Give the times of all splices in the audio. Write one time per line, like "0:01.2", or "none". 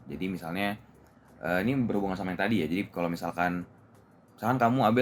none